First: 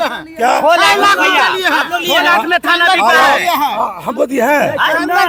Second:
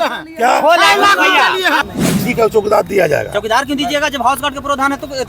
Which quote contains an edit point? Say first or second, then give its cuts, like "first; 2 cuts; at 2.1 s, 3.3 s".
second; 1 cut; at 1.9 s